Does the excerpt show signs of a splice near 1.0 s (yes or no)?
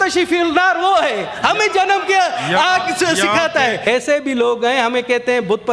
no